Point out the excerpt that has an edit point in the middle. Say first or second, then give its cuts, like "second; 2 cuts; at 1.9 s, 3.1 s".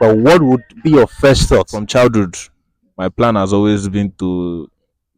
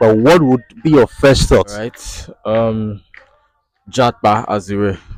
first; 1 cut; at 1.8 s